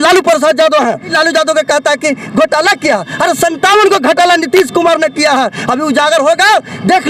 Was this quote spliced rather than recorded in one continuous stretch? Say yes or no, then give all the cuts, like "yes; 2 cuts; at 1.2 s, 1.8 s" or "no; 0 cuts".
yes; 1 cut; at 1.1 s